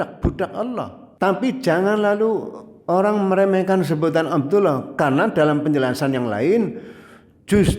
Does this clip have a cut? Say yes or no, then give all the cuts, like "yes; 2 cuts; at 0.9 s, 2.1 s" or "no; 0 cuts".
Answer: yes; 1 cut; at 1.0 s